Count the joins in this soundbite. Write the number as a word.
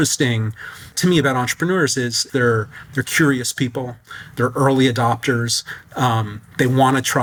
zero